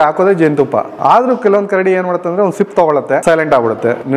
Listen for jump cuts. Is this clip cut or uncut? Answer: cut